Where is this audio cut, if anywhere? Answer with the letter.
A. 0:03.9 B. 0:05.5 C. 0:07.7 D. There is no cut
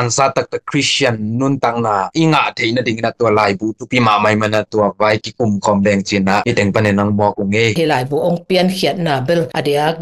C